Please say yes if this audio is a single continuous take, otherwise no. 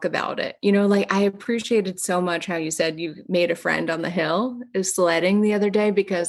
yes